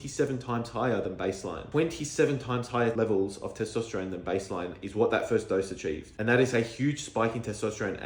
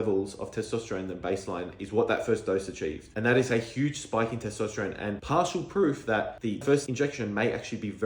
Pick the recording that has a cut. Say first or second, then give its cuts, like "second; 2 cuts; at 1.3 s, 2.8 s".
second; 1 cut; at 6.7 s